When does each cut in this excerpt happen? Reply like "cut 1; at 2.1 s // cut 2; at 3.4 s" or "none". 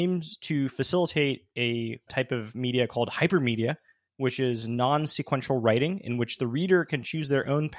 cut 1; at 2.1 s